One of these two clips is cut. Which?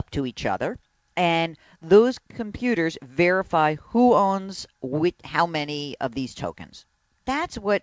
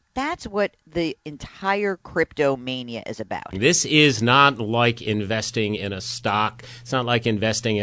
second; 1 cut; at 3.5 s

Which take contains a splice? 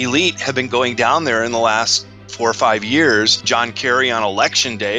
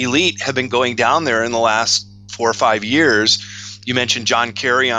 first; 1 cut; at 3.4 s

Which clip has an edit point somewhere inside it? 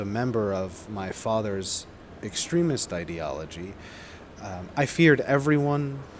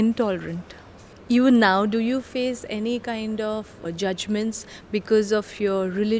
second; 1 cut; at 0.9 s

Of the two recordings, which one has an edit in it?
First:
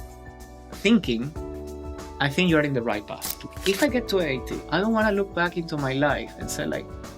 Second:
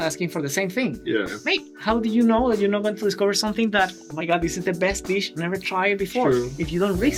first; 2 cuts; at 3.5 s, 4.6 s

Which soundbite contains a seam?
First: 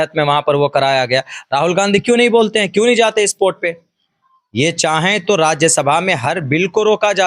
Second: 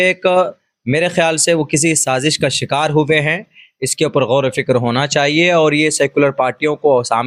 first; 1 cut; at 4.0 s

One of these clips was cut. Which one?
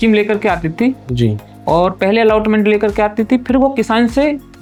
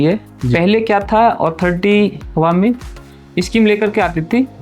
second; 1 cut; at 2.3 s

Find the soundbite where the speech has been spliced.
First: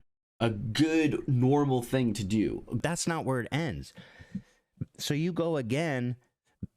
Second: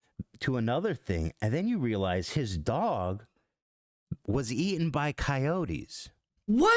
first; 1 cut; at 2.8 s

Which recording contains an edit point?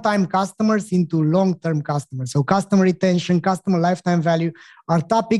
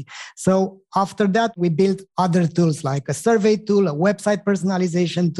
second; 2 cuts; at 1.5 s, 3.2 s

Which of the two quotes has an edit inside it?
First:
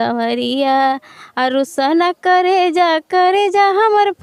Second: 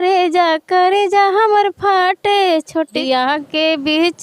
second; 1 cut; at 3.0 s

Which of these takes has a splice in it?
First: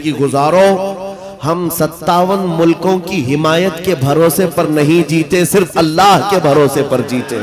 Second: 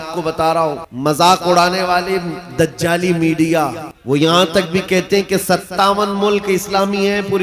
second; 2 cuts; at 0.9 s, 3.9 s

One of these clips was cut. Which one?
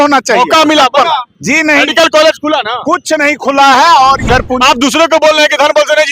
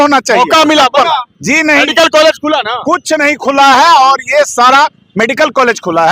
first; 1 cut; at 4.3 s

